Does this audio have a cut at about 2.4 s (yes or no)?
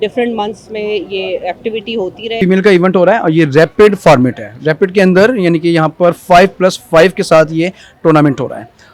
yes